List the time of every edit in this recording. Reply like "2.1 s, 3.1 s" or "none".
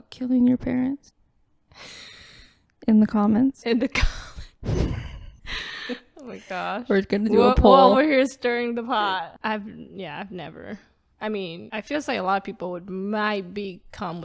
none